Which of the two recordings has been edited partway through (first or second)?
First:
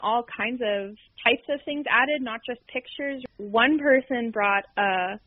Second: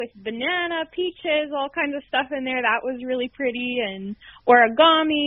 first